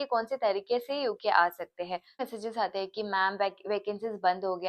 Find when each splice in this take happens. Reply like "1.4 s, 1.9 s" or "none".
2.2 s